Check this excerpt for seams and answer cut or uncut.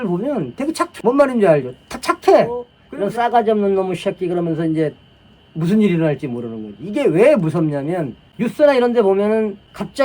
cut